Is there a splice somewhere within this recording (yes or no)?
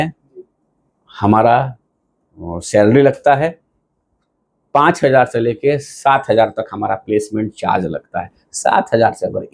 no